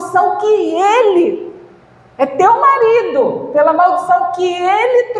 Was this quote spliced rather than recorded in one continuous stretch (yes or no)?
no